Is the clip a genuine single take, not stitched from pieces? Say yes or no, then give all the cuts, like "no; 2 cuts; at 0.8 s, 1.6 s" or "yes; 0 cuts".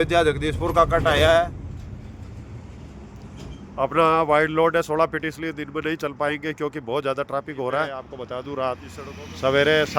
no; 2 cuts; at 1.8 s, 8.2 s